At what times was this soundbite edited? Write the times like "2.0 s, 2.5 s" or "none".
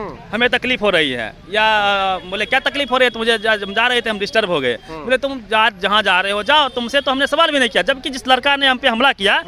none

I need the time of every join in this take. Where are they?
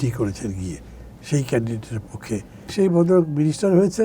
2.7 s

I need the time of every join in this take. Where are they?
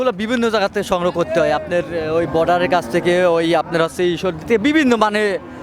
none

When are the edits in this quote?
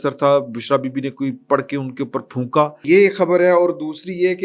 2.8 s

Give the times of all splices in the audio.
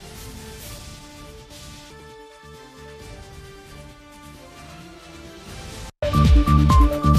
5.9 s

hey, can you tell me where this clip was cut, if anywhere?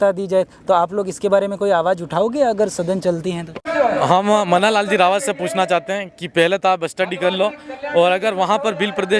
3.7 s

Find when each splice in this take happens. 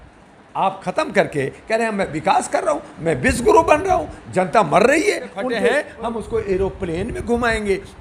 5.6 s

